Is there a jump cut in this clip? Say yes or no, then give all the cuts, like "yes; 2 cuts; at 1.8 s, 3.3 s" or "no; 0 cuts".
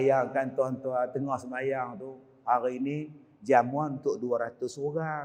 no; 0 cuts